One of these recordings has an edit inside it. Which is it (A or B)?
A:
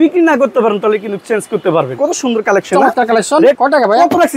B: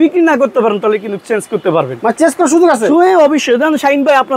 A